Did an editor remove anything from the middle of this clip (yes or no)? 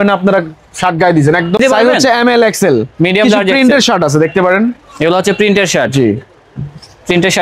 yes